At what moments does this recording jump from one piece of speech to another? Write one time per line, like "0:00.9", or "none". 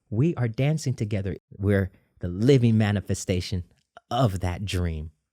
0:01.4